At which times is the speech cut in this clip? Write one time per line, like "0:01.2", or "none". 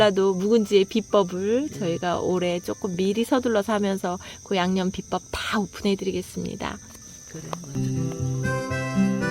0:07.8